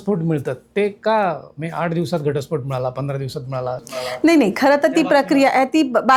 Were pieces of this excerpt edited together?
no; 0 cuts

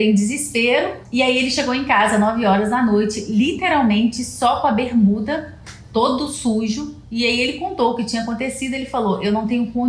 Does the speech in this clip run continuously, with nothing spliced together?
no; 1 cut; at 1.0 s

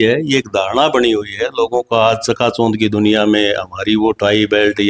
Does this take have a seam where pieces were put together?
no; 0 cuts

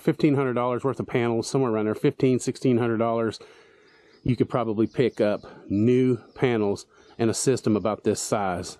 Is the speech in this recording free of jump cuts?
yes; 0 cuts

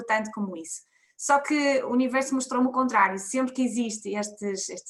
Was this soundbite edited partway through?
no; 0 cuts

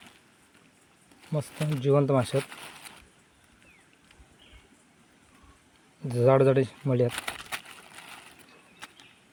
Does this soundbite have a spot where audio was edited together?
no; 0 cuts

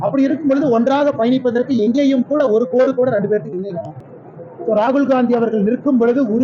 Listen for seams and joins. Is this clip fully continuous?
no; 1 cut; at 3.9 s

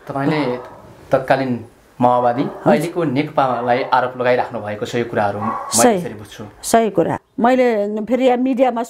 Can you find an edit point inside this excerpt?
yes; 1 cut; at 7.2 s

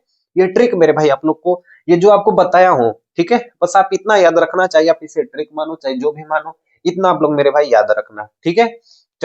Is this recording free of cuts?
yes; 0 cuts

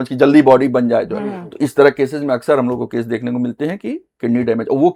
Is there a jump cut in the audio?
no; 0 cuts

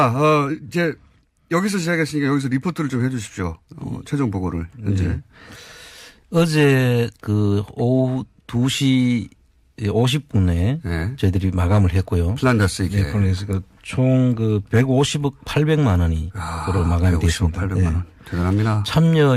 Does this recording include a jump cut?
no; 0 cuts

